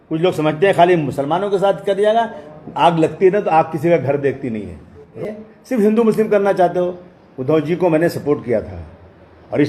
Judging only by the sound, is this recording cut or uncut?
cut